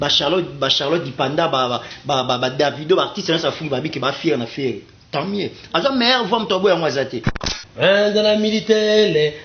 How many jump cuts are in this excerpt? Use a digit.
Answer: 1